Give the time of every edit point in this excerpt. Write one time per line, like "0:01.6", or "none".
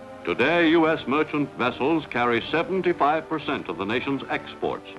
none